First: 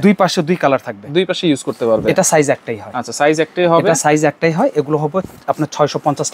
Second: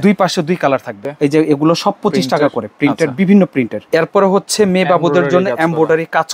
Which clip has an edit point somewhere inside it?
second; 2 cuts; at 1.0 s, 3.8 s

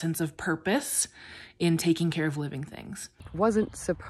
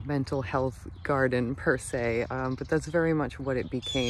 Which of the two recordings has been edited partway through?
first; 1 cut; at 3.2 s

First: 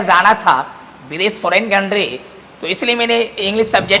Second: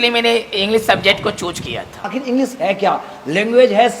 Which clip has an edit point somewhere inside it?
second; 1 cut; at 2.1 s

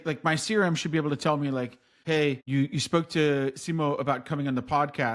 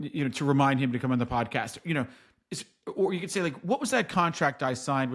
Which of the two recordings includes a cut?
first; 1 cut; at 2.1 s

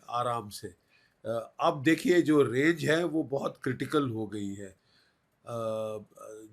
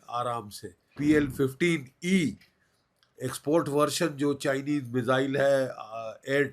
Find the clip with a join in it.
second; 1 cut; at 0.9 s

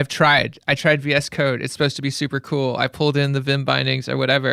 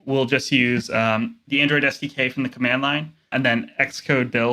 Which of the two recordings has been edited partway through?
second; 2 cuts; at 1.4 s, 3.3 s

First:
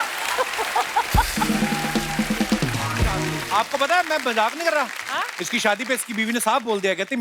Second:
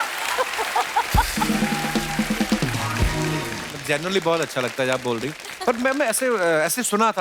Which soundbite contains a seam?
first; 1 cut; at 3.4 s

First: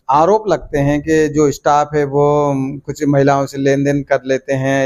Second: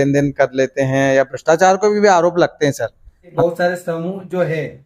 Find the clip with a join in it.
second; 1 cut; at 3.3 s

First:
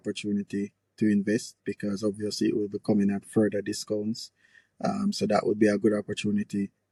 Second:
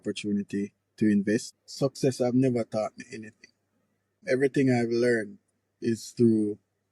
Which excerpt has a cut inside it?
second; 2 cuts; at 1.6 s, 4.2 s

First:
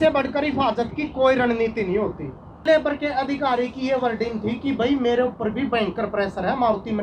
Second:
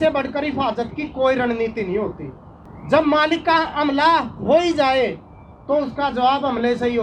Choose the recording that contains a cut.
first; 1 cut; at 2.6 s

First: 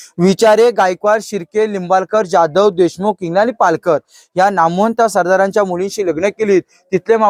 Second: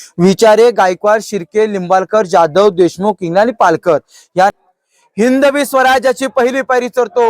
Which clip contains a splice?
second; 1 cut; at 4.5 s

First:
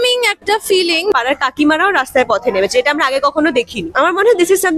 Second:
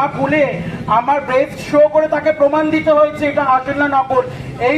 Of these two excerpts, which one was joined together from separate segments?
first; 2 cuts; at 1.1 s, 3.8 s

